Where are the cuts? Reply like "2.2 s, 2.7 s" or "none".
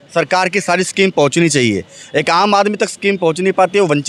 none